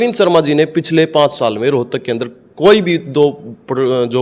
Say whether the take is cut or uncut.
uncut